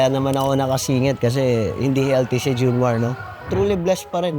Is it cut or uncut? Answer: cut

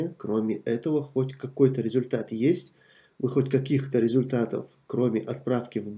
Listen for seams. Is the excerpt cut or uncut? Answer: uncut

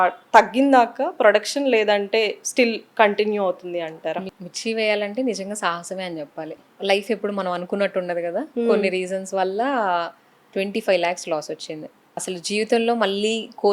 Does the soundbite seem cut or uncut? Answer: cut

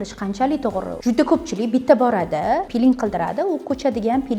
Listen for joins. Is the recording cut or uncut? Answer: cut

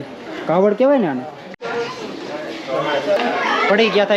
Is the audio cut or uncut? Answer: cut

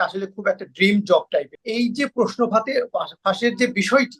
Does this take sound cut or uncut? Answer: cut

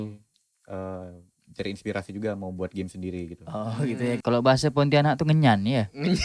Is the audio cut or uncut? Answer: cut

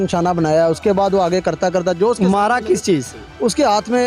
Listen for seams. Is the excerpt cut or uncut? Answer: uncut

